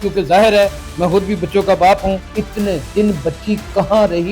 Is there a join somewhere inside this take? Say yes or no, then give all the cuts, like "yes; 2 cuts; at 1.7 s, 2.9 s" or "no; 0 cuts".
yes; 1 cut; at 2.3 s